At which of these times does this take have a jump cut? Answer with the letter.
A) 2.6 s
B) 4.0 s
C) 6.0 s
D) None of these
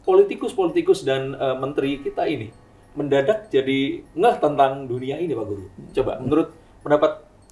D